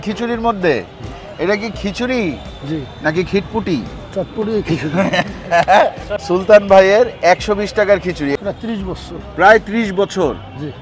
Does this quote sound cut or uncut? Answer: cut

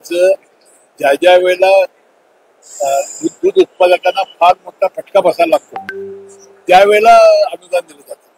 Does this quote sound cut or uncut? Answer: uncut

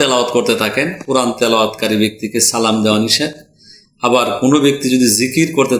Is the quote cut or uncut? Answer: uncut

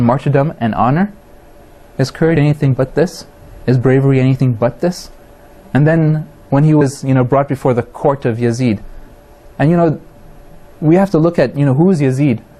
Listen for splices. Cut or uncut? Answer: cut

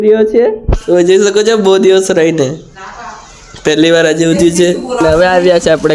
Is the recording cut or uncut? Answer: cut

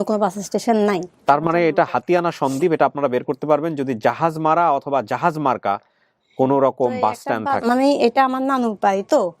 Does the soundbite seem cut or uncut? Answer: cut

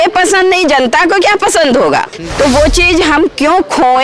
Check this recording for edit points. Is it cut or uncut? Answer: cut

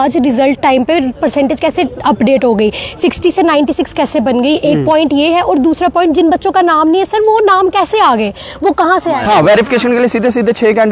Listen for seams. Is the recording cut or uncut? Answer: cut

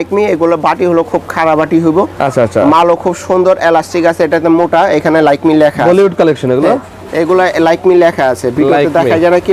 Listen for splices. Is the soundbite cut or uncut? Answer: uncut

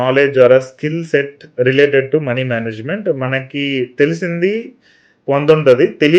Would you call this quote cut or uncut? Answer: uncut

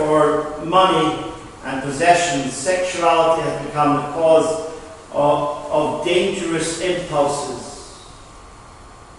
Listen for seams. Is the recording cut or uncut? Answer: cut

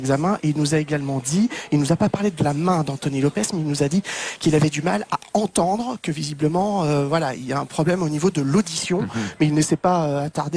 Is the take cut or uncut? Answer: uncut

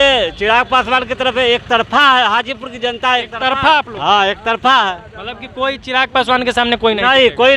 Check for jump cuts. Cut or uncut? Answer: uncut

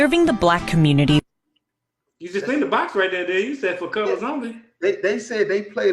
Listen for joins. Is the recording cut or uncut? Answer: uncut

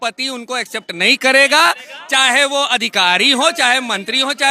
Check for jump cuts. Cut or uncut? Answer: uncut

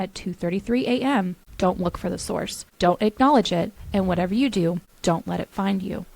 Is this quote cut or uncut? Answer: cut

